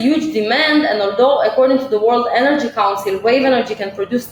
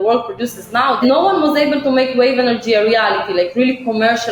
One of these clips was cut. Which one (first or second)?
second